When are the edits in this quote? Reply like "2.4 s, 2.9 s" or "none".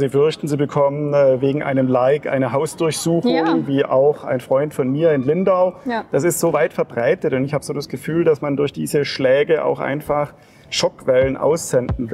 none